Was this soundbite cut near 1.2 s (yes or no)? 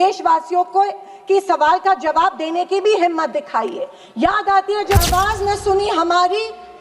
no